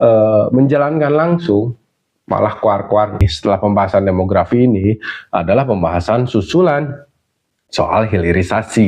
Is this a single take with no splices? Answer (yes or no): no